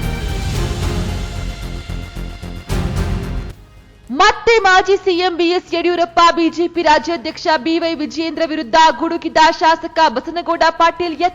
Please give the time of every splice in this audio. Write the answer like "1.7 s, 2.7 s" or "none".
3.4 s